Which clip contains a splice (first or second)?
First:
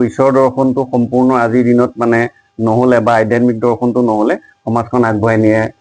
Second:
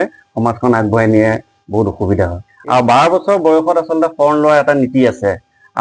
second